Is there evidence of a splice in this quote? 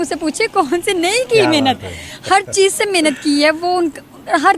no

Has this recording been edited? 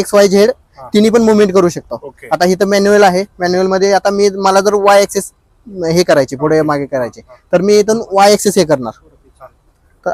no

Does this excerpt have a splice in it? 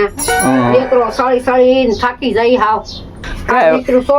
yes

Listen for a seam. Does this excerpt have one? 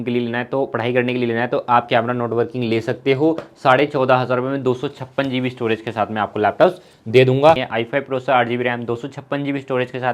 yes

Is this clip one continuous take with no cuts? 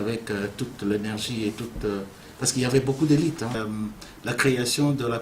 no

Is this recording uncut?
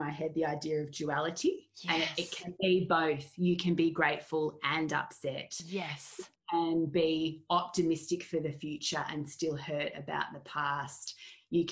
yes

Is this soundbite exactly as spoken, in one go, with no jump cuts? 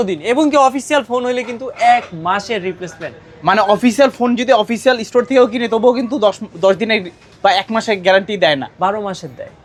yes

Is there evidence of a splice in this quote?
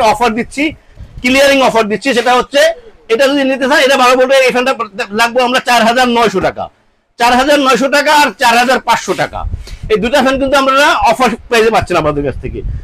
no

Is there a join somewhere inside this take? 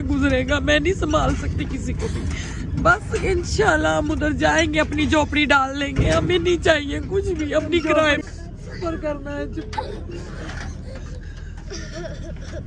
yes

